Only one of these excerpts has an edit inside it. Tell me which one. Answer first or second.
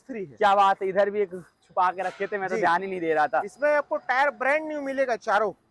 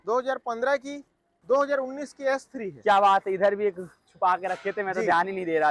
second